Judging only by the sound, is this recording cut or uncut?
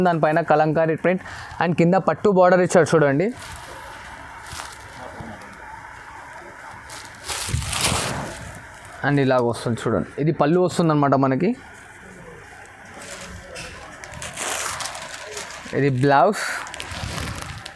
uncut